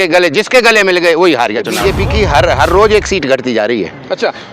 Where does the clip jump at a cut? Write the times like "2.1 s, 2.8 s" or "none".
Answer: 1.7 s